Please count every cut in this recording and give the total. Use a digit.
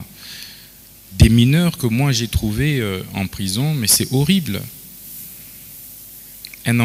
0